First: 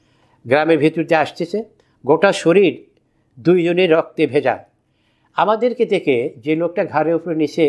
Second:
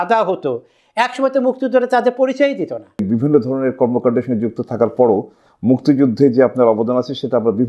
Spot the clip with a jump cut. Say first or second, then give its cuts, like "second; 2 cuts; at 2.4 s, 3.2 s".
second; 1 cut; at 3.0 s